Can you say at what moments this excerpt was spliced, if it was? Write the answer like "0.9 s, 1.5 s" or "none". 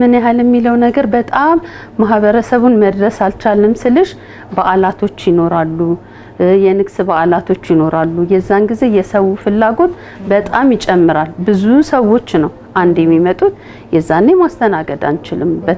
none